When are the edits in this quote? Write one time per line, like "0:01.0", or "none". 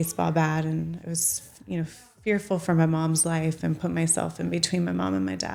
none